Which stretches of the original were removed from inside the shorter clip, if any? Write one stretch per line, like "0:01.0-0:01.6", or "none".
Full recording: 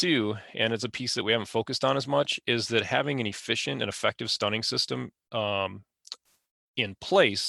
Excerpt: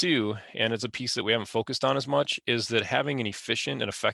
none